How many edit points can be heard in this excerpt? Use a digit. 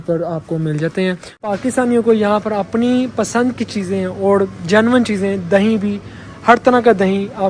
1